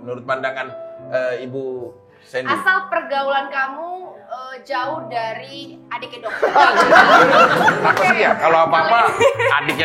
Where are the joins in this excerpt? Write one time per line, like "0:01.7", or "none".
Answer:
none